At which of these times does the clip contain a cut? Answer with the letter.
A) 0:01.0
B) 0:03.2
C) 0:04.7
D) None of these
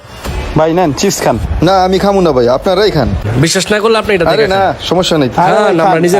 B